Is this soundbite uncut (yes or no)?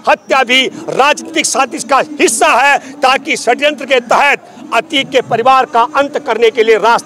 yes